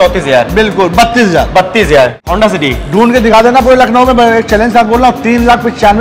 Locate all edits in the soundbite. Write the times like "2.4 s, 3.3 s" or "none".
2.2 s